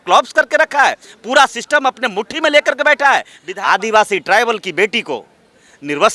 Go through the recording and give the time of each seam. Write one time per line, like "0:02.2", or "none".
0:03.4